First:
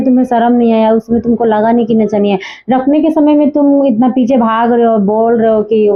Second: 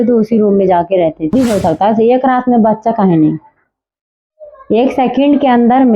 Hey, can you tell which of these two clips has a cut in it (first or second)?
second